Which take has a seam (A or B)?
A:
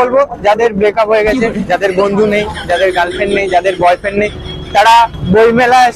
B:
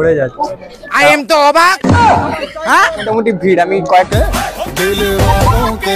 B